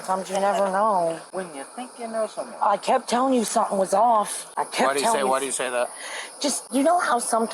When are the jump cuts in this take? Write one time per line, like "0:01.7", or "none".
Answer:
0:01.2
0:04.4
0:06.6